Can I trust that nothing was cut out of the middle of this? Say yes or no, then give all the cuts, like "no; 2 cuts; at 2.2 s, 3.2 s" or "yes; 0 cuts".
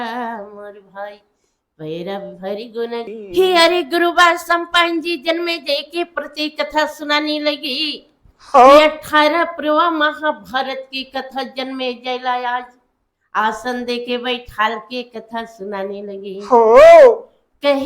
no; 1 cut; at 3.1 s